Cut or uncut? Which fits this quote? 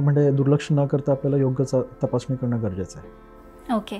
uncut